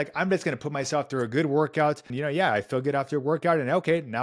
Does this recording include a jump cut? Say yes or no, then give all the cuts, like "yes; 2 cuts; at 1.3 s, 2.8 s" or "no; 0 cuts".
yes; 1 cut; at 2.1 s